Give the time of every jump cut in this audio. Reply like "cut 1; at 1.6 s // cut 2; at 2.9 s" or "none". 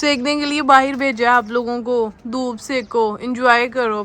none